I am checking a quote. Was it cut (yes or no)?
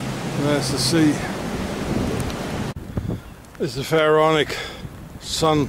yes